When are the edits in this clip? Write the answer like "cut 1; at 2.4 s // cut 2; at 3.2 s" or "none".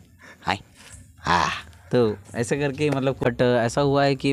cut 1; at 3.2 s